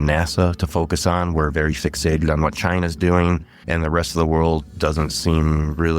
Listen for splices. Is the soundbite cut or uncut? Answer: cut